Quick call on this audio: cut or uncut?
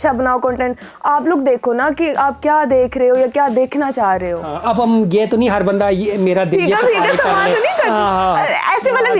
uncut